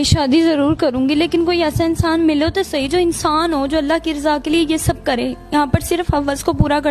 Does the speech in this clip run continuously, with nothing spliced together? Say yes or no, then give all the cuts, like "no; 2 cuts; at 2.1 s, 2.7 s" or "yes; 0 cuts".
yes; 0 cuts